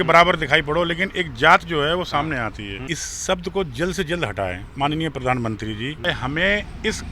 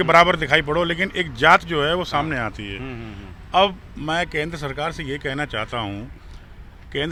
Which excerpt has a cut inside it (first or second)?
first